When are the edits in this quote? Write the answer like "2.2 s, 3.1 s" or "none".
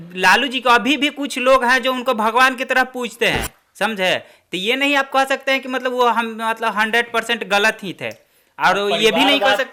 none